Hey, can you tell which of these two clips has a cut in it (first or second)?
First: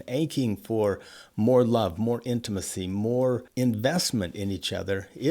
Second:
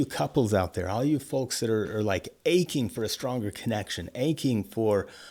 first